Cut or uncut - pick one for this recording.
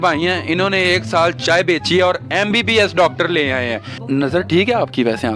cut